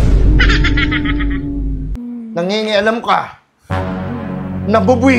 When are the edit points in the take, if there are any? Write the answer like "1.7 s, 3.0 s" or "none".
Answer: 2.0 s

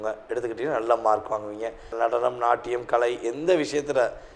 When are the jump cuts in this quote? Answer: 1.9 s

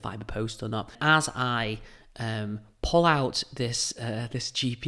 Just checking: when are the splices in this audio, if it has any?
1.0 s

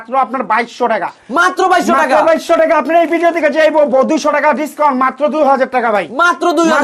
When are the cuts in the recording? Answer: none

